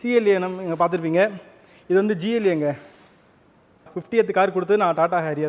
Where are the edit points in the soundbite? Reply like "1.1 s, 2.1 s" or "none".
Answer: 3.9 s